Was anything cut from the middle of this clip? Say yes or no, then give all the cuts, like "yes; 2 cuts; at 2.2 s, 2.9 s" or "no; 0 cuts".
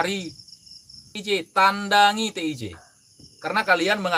yes; 1 cut; at 1.2 s